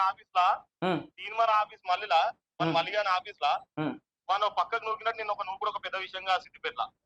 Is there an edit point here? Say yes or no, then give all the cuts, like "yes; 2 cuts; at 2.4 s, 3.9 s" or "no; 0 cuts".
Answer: no; 0 cuts